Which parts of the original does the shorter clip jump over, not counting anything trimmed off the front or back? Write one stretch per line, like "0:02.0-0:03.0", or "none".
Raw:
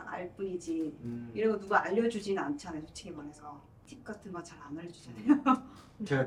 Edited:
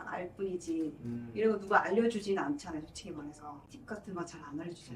0:03.7-0:03.9